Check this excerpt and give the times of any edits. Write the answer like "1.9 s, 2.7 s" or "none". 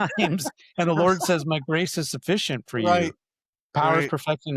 none